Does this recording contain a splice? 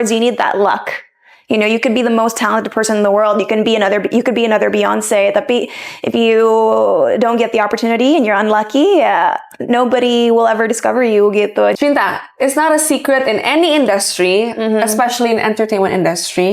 yes; 1 cut; at 11.8 s

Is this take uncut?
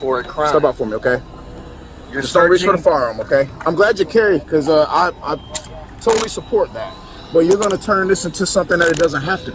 yes; 0 cuts

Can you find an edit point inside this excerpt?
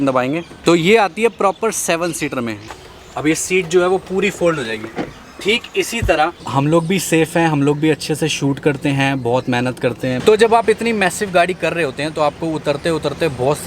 yes; 3 cuts; at 2.6 s, 6.4 s, 10.2 s

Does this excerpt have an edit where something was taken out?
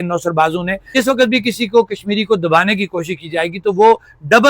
yes; 1 cut; at 0.9 s

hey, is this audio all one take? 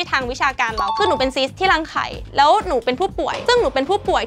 no; 1 cut; at 1.0 s

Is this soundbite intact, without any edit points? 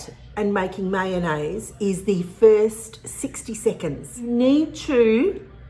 no; 1 cut; at 4.3 s

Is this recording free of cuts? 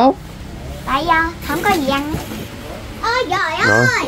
no; 1 cut; at 2.2 s

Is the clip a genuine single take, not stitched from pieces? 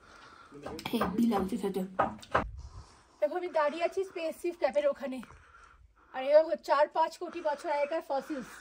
no; 1 cut; at 2.4 s

